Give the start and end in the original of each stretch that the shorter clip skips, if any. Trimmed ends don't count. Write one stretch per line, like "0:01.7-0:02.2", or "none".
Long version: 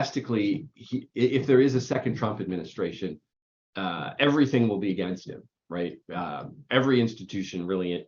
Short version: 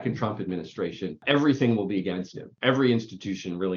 0:03.2-0:04.1
0:05.4-0:06.5

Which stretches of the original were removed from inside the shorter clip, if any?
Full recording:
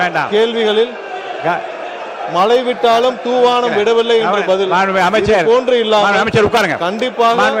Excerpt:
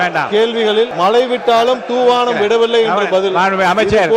0:00.9-0:02.3

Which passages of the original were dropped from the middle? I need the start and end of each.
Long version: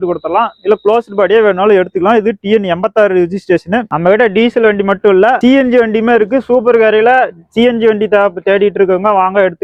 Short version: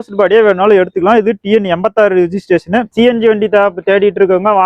0:03.9-0:07.5

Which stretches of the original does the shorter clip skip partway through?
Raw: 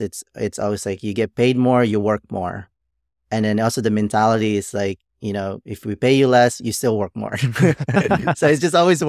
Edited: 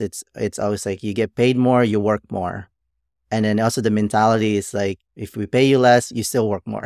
0:05.1-0:05.6

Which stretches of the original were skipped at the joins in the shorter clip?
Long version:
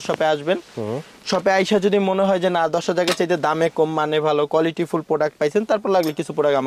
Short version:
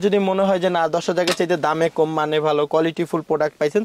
none

